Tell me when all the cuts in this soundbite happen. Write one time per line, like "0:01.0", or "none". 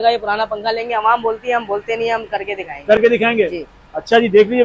none